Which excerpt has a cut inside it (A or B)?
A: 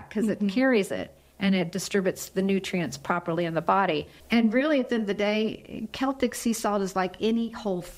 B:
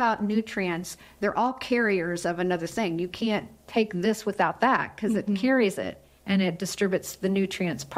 A